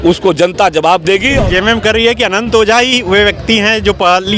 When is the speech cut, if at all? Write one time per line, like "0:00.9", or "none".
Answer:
0:01.4